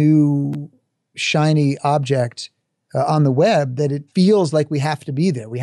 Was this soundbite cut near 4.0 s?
yes; 1 cut; at 4.0 s

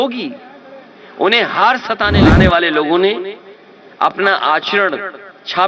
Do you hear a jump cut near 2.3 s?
yes; 1 cut; at 2.3 s

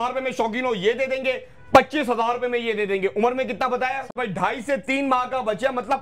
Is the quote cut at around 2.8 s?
no; 1 cut; at 4.1 s

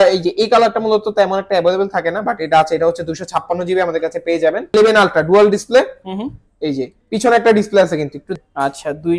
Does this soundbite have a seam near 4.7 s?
yes; 2 cuts; at 4.7 s, 8.3 s

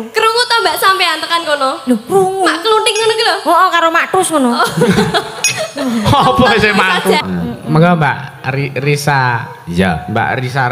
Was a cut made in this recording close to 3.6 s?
no; 1 cut; at 7.2 s

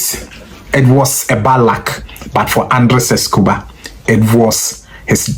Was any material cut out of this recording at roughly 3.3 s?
no; 0 cuts

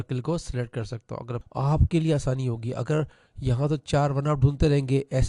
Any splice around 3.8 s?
no; 1 cut; at 1.3 s

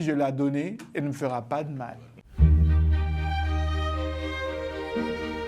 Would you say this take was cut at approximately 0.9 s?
no; 1 cut; at 2.2 s

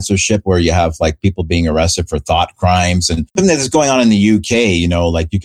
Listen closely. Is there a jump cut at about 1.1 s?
no; 1 cut; at 3.3 s

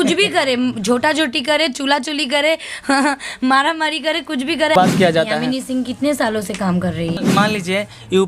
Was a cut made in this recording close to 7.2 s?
yes; 2 cuts; at 4.8 s, 7.2 s

